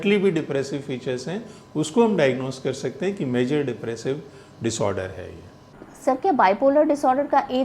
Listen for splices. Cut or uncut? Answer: uncut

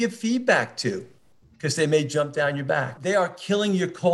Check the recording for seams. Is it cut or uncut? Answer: cut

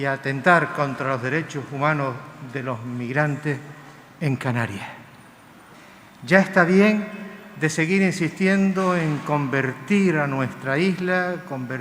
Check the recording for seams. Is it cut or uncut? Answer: cut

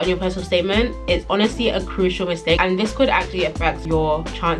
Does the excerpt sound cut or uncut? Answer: uncut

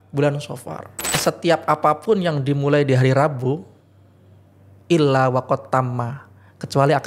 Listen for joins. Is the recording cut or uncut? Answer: cut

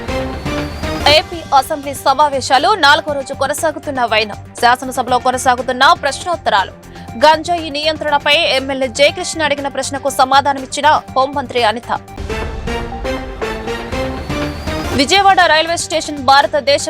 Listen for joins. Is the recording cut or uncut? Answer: cut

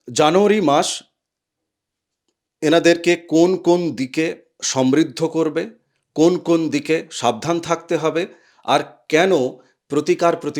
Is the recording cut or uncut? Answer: uncut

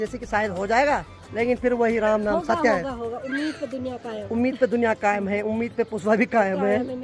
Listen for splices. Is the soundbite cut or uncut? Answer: uncut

